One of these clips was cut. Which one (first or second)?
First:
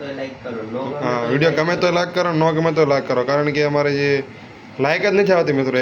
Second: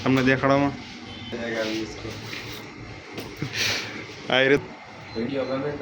second